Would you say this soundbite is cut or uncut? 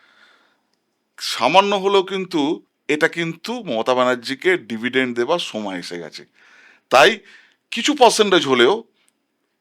cut